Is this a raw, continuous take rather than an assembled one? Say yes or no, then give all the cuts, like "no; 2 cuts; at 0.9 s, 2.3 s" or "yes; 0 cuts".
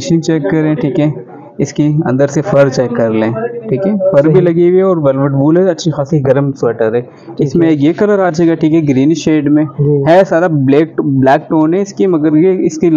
yes; 0 cuts